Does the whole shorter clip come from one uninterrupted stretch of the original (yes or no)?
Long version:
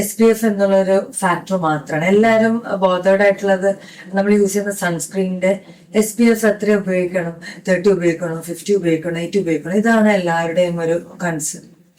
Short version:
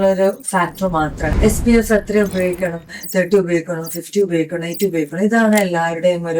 no